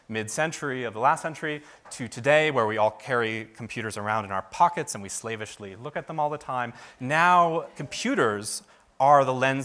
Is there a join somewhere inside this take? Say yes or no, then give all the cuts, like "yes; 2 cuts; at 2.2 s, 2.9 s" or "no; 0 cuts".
no; 0 cuts